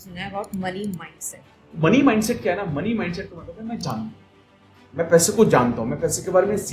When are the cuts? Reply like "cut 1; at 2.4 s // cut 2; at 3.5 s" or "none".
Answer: cut 1; at 1.7 s